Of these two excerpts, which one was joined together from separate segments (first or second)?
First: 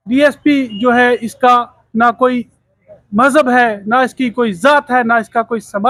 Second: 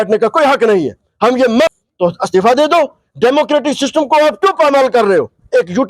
second